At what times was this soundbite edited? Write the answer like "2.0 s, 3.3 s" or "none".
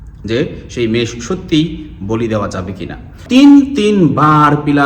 3.1 s